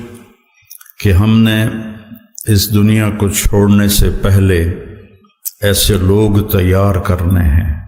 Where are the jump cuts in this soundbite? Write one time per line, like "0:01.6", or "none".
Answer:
none